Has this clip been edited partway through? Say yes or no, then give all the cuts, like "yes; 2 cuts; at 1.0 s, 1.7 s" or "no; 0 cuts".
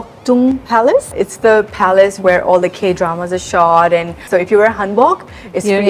yes; 2 cuts; at 1.1 s, 4.3 s